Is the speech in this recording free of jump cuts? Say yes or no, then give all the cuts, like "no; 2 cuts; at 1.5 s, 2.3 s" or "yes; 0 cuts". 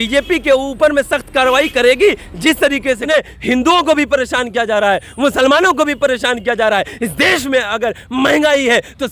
no; 1 cut; at 3.0 s